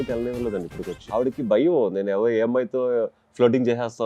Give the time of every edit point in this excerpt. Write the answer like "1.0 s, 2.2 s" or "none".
1.0 s